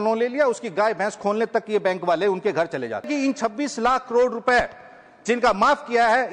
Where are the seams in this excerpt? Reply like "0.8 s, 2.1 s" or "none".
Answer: 3.1 s